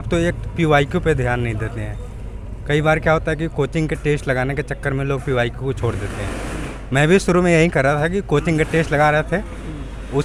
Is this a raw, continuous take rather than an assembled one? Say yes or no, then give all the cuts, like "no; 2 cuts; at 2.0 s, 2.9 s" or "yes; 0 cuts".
yes; 0 cuts